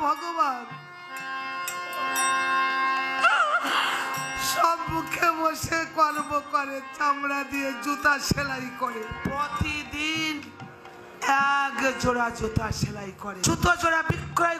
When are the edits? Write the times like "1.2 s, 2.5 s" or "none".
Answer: 9.1 s, 13.4 s